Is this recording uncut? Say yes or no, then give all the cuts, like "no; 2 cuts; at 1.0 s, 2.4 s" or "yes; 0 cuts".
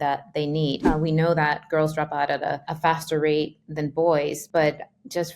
no; 3 cuts; at 0.9 s, 2.7 s, 4.4 s